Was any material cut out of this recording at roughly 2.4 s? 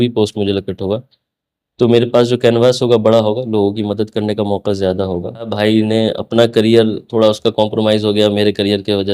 no; 1 cut; at 5.5 s

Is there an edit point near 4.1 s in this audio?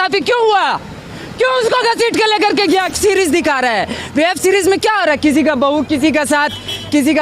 no; 1 cut; at 2.9 s

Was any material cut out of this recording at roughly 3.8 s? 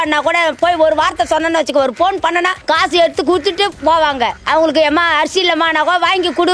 yes; 3 cuts; at 2.6 s, 3.8 s, 4.4 s

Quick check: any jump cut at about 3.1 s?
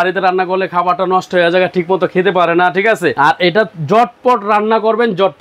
yes; 1 cut; at 3.1 s

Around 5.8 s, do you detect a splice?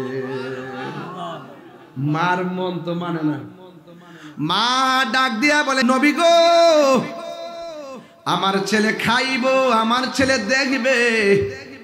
yes; 1 cut; at 5.8 s

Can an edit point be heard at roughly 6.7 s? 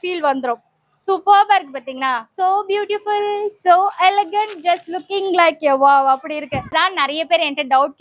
yes; 1 cut; at 6.7 s

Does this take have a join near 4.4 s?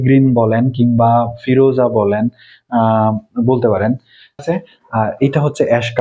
yes; 1 cut; at 4.4 s

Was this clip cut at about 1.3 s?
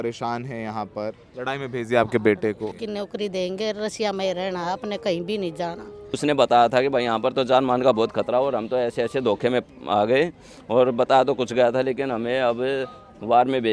yes; 3 cuts; at 1.3 s, 2.7 s, 6.2 s

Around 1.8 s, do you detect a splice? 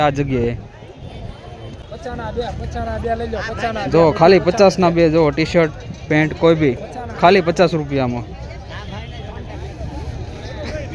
yes; 1 cut; at 1.8 s

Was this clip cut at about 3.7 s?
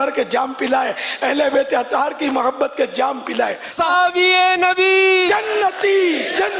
yes; 1 cut; at 3.7 s

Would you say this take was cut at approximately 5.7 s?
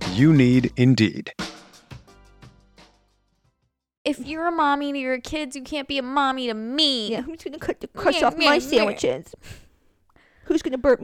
no; 1 cut; at 4.0 s

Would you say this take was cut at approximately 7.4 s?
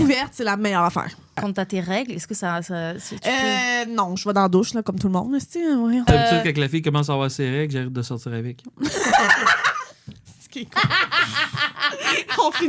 no; 2 cuts; at 1.4 s, 6.1 s

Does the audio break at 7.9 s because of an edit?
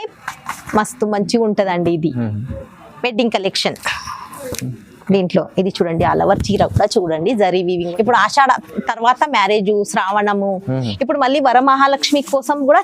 yes; 1 cut; at 7.9 s

